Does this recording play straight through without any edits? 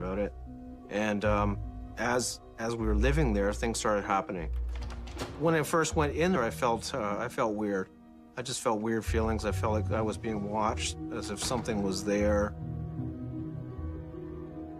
yes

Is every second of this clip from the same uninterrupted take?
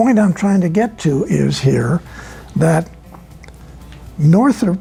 yes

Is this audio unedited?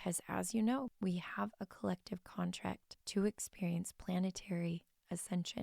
no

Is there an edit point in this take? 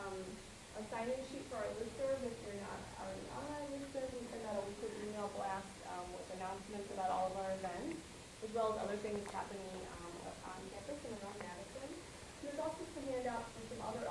yes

